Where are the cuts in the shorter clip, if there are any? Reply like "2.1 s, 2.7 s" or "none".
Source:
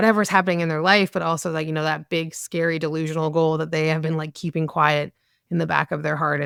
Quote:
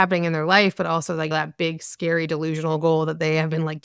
1.3 s